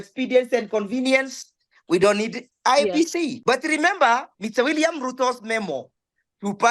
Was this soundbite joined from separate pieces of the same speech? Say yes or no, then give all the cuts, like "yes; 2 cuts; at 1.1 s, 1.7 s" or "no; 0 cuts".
yes; 1 cut; at 3.4 s